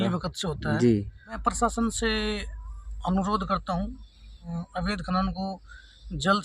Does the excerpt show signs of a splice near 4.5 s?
yes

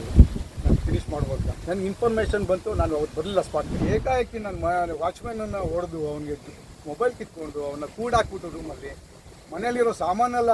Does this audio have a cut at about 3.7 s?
yes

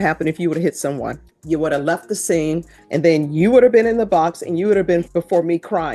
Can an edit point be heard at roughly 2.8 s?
yes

